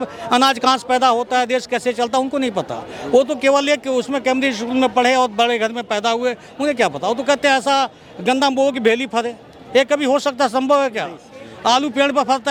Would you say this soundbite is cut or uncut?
uncut